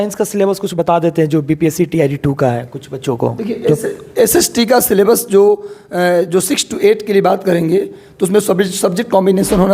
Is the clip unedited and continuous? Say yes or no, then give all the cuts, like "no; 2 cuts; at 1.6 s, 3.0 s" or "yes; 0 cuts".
yes; 0 cuts